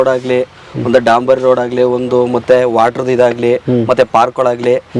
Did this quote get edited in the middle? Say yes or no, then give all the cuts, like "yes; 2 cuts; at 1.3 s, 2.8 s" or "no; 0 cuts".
no; 0 cuts